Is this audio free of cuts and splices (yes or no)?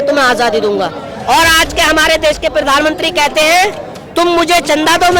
yes